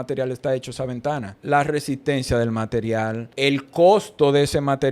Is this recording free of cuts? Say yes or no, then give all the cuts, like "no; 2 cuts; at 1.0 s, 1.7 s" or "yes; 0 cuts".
no; 2 cuts; at 1.4 s, 3.3 s